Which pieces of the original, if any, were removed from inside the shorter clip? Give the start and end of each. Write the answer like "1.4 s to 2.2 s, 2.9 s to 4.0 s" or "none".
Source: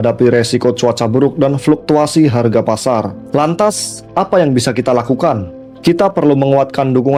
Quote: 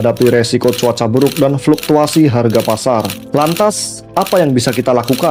none